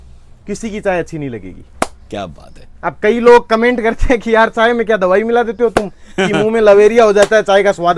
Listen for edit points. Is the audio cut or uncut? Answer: uncut